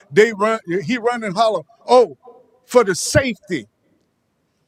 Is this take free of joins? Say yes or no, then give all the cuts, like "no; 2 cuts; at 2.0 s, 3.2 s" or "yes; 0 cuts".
yes; 0 cuts